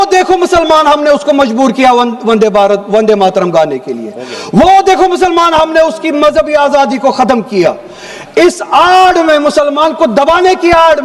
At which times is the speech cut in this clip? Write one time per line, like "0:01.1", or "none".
none